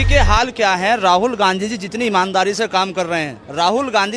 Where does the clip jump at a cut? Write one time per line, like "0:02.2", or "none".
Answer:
none

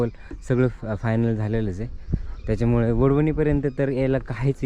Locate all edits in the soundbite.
none

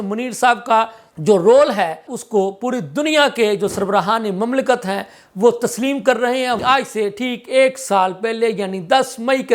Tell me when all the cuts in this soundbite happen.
0:01.0
0:02.1
0:06.6

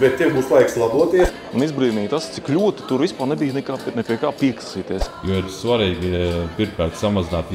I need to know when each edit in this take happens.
0:01.3
0:05.0

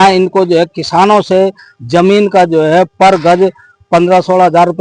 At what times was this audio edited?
none

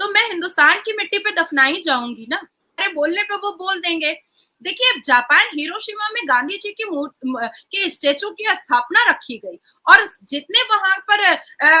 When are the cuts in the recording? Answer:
0:02.9

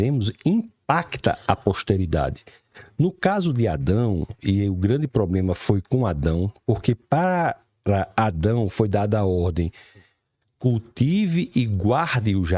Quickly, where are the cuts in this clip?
none

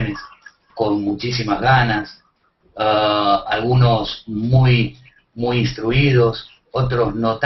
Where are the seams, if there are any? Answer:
none

